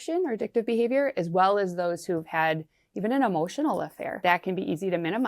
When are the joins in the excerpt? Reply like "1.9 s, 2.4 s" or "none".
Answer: 4.1 s